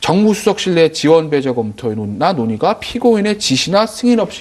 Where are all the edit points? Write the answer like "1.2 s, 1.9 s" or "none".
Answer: 2.8 s